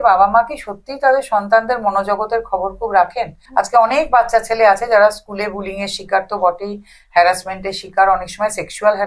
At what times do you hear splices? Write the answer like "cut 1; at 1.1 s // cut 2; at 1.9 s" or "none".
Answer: cut 1; at 3.4 s